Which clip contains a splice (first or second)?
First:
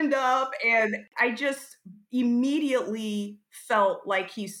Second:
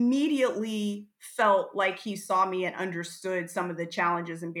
first